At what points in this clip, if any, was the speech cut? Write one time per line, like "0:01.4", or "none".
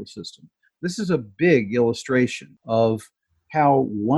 0:02.5